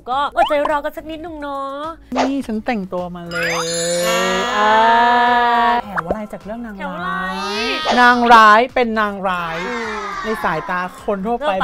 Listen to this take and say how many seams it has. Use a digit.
3